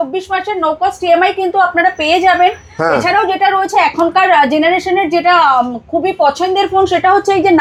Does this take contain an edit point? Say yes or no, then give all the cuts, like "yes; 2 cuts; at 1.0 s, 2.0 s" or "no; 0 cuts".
no; 0 cuts